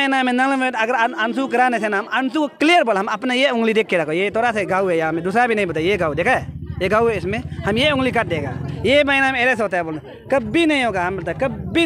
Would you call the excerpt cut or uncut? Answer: uncut